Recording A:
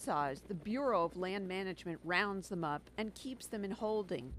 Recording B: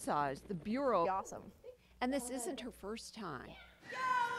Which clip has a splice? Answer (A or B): A